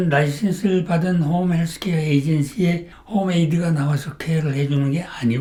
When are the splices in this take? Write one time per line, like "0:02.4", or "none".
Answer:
none